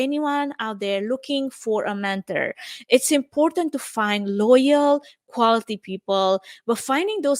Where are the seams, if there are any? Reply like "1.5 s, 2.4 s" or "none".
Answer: none